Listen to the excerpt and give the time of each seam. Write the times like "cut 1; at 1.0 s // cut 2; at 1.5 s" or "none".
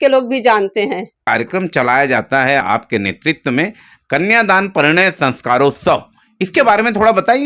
cut 1; at 1.1 s // cut 2; at 2.6 s